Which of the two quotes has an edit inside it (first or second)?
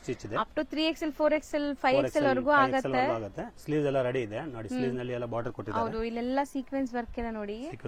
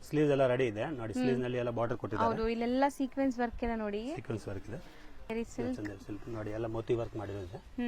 second